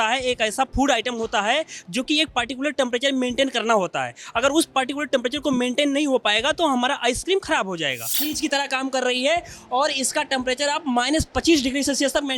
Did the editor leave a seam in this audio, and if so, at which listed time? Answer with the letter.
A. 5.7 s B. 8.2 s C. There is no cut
B